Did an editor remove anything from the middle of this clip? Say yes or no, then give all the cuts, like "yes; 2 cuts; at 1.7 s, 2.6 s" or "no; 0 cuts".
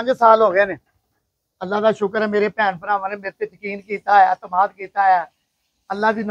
no; 0 cuts